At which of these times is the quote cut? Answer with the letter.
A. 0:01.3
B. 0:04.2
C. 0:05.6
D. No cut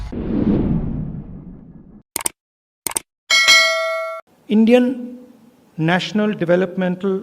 B